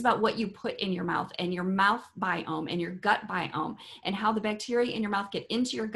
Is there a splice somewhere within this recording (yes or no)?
no